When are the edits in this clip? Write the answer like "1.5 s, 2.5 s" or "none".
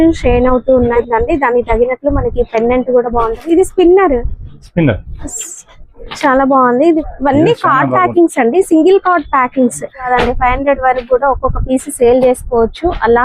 0.9 s, 7.0 s, 10.1 s